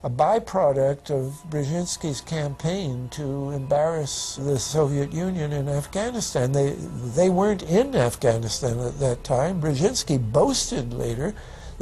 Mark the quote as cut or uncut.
cut